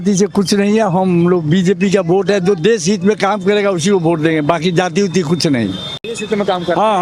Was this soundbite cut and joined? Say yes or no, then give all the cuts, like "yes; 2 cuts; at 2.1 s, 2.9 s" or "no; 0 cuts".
no; 0 cuts